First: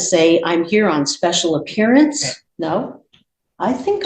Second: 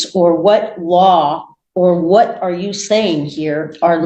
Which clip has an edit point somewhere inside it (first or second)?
first